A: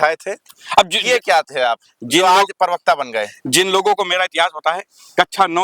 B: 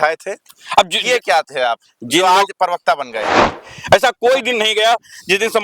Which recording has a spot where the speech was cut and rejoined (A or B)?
B